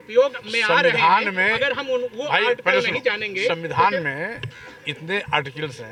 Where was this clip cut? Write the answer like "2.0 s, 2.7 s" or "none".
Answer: none